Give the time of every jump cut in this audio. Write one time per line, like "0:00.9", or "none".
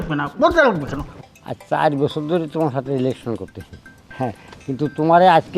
0:01.1